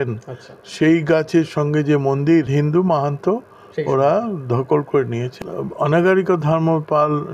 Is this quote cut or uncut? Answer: cut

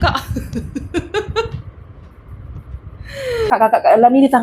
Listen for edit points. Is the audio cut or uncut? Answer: cut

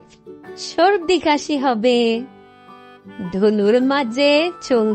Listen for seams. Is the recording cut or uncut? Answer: uncut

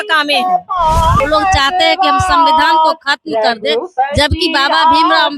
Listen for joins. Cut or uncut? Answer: cut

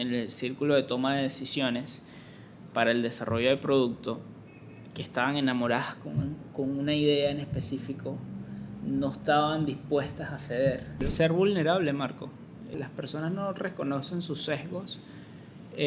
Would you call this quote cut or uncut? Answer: cut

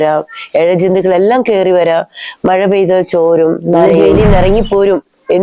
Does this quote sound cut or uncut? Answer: cut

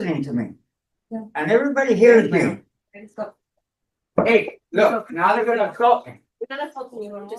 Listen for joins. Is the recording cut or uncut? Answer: uncut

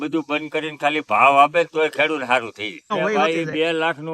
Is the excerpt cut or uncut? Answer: cut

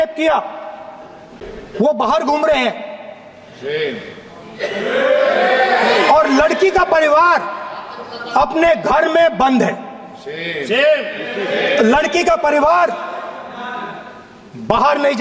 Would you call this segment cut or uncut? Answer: uncut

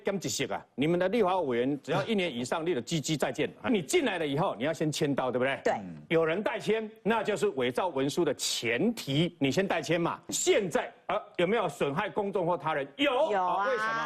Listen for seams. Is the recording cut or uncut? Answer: cut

